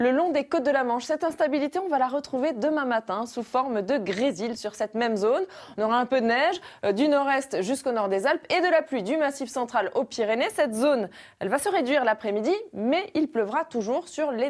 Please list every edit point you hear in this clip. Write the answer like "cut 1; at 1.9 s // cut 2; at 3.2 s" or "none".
none

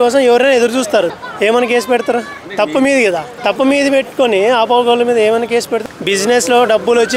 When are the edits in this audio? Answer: cut 1; at 1.1 s // cut 2; at 2.4 s // cut 3; at 3.3 s // cut 4; at 5.7 s

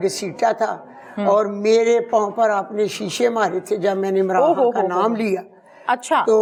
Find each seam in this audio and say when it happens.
none

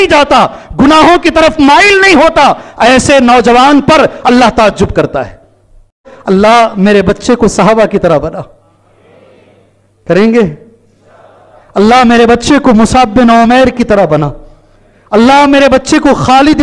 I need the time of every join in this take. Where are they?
cut 1; at 6.1 s

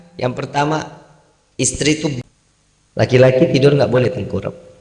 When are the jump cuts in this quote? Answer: cut 1; at 2.2 s

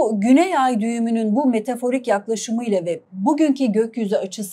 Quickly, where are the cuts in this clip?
none

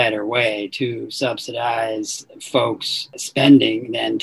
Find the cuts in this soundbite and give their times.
cut 1; at 3.2 s

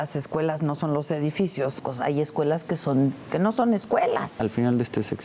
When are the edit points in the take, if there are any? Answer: cut 1; at 1.8 s // cut 2; at 4.3 s

